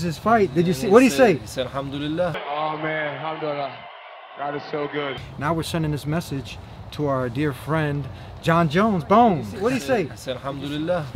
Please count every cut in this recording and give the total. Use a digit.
3